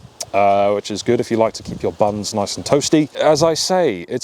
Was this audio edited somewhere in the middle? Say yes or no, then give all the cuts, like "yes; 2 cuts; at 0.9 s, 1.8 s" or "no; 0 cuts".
yes; 1 cut; at 3.1 s